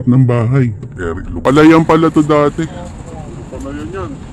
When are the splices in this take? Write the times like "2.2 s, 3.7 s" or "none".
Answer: 1.3 s

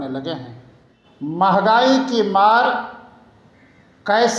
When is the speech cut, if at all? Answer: 1.3 s

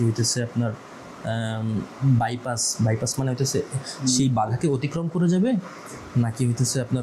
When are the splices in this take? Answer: none

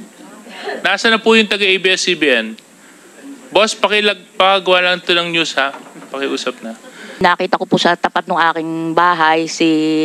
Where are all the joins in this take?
7.2 s

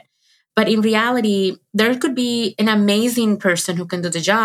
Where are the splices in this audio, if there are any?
2.5 s

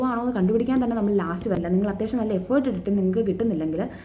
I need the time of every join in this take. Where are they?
1.6 s

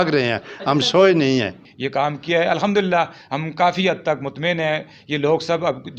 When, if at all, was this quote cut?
1.7 s

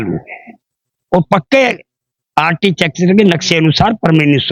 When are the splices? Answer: none

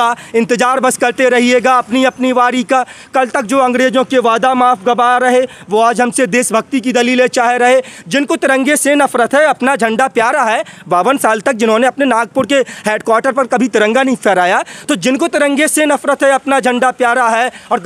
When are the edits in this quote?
none

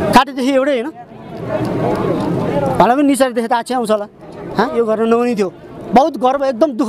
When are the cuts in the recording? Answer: 4.7 s

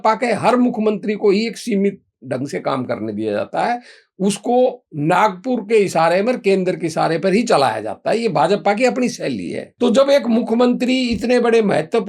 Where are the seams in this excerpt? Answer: 9.6 s

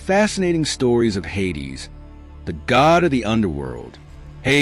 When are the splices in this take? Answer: 3.2 s

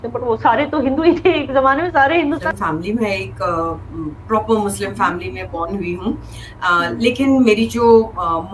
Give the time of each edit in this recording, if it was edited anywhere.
2.4 s

